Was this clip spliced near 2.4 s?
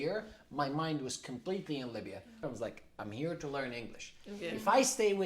yes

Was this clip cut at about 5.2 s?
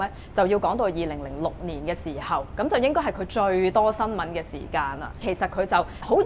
yes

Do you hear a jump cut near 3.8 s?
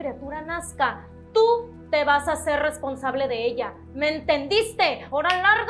no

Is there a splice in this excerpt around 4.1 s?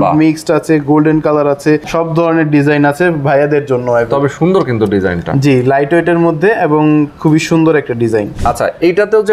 yes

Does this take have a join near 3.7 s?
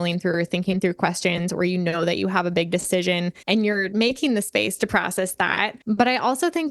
yes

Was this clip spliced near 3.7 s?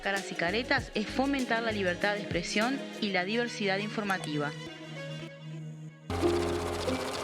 no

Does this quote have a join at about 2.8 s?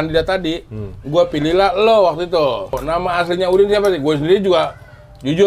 yes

